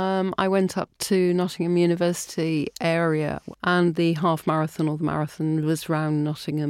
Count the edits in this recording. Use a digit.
1